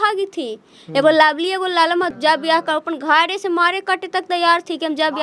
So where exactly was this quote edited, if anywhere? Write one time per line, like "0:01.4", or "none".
0:02.1